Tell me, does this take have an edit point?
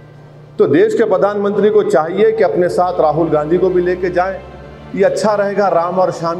no; 0 cuts

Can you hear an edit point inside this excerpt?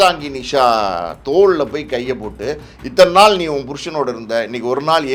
no; 0 cuts

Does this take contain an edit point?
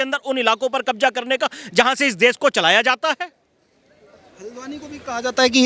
no; 0 cuts

